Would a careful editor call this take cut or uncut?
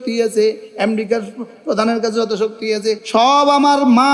uncut